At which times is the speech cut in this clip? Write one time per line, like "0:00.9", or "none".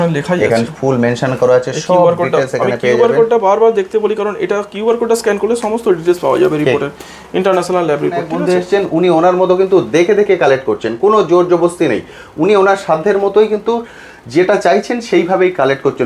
0:08.3